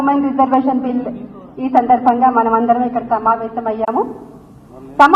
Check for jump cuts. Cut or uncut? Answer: cut